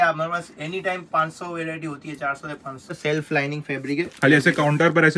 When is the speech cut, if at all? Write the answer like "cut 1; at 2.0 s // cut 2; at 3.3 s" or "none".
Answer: cut 1; at 3.0 s // cut 2; at 4.1 s